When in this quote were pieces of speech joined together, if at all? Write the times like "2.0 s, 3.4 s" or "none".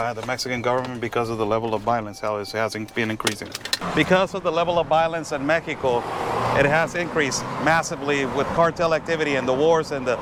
none